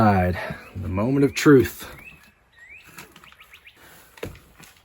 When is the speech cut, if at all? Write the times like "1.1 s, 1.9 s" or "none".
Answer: 3.8 s